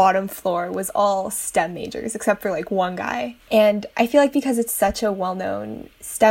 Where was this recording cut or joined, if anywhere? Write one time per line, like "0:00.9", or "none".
0:03.4